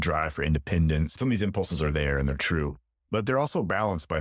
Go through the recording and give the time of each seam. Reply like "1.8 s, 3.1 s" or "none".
1.1 s